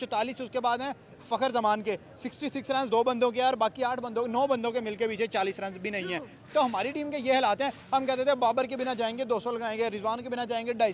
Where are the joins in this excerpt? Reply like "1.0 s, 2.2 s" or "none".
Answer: none

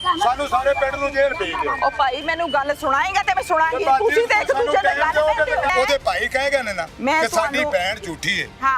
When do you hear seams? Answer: 5.7 s, 6.8 s

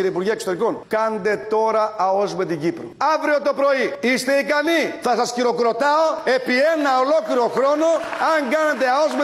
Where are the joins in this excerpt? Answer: none

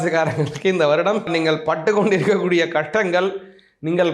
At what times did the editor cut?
1.3 s

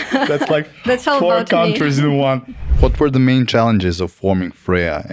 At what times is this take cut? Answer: 2.7 s

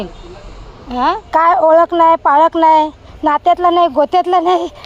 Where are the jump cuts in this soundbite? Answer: 1.2 s

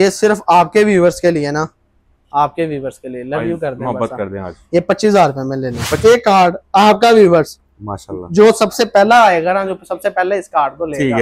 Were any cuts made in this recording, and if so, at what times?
6.0 s

